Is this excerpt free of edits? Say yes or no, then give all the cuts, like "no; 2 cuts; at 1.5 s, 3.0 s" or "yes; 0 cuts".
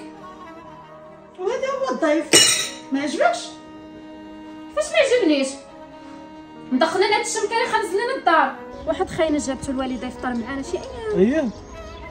no; 1 cut; at 8.7 s